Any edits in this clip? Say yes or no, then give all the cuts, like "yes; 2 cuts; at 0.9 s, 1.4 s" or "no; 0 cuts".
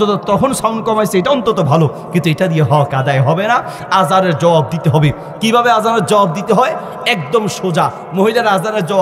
no; 0 cuts